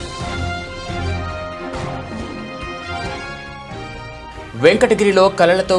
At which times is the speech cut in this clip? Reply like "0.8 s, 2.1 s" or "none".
3.6 s